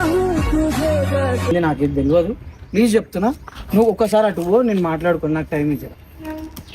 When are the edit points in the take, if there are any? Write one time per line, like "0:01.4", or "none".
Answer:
0:01.5